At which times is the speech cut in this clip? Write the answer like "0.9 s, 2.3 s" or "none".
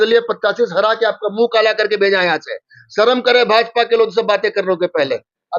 none